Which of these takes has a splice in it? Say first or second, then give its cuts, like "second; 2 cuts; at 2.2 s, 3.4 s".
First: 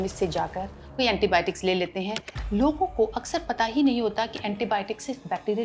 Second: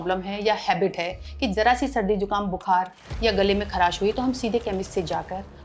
first; 1 cut; at 2.2 s